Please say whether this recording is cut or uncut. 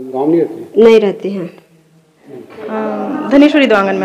cut